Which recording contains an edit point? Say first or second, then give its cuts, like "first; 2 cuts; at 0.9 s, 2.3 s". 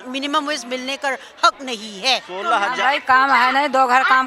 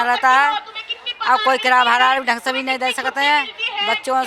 first; 1 cut; at 2.7 s